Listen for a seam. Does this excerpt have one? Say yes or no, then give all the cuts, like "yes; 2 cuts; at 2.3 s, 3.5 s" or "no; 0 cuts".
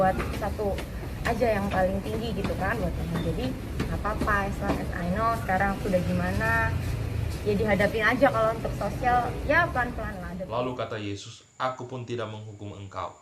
yes; 1 cut; at 10.2 s